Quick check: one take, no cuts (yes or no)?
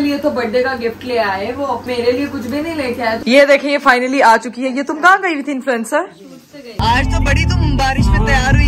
no